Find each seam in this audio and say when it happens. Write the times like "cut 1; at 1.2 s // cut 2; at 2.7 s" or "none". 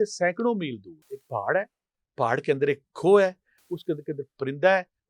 cut 1; at 1.2 s